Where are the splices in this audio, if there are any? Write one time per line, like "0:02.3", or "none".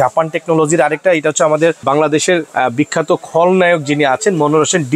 0:02.2